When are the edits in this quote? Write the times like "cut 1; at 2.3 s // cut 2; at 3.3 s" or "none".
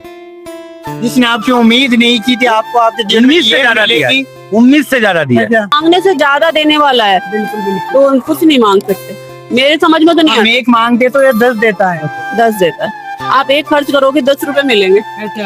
cut 1; at 5.8 s